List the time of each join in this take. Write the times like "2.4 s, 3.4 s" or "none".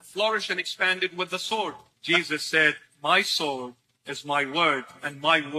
4.0 s